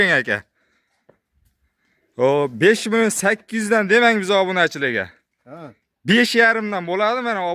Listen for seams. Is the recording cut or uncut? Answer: uncut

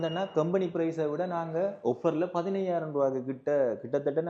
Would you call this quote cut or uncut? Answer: uncut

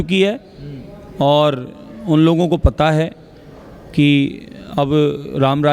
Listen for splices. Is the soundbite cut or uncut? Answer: uncut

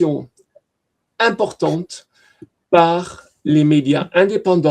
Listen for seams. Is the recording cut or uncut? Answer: uncut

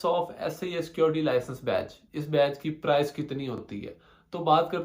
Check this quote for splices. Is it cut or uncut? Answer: uncut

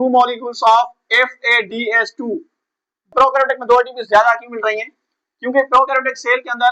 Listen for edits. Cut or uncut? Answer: cut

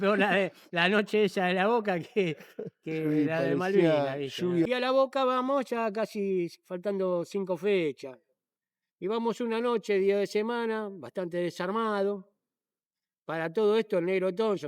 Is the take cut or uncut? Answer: cut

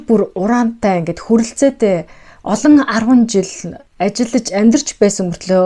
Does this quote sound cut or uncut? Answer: uncut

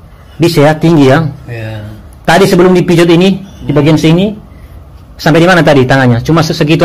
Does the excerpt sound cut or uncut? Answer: uncut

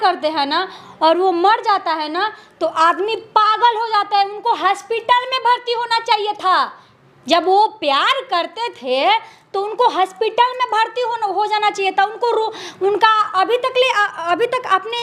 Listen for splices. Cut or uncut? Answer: uncut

